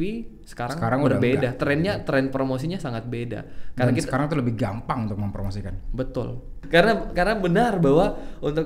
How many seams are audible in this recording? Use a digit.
1